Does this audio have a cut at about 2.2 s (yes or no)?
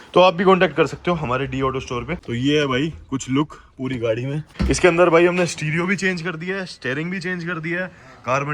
yes